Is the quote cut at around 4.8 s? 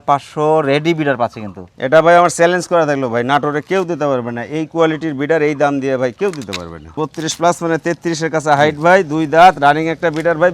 no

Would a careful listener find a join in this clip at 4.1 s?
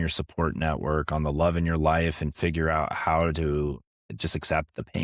yes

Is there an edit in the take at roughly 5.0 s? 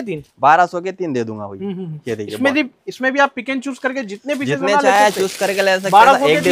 no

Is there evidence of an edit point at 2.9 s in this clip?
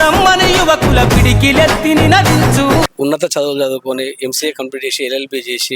yes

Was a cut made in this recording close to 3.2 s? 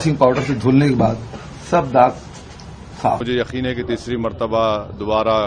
yes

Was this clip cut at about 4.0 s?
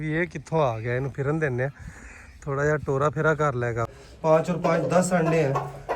yes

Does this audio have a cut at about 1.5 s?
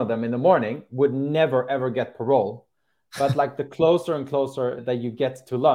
no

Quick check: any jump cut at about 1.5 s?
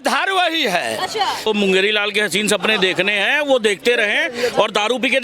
yes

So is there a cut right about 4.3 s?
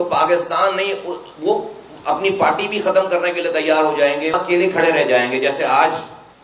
yes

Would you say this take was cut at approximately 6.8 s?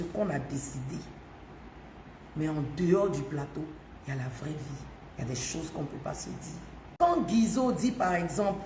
yes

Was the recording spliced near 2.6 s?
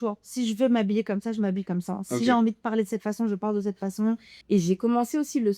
no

